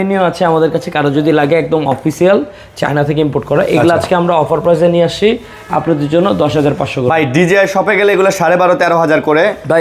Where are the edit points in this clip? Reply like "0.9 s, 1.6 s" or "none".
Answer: none